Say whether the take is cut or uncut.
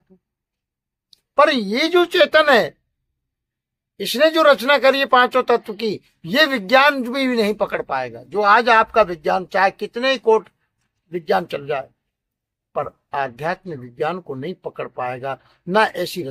uncut